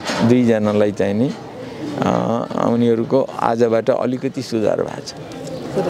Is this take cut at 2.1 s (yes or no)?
no